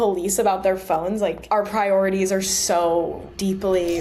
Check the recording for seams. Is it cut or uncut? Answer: uncut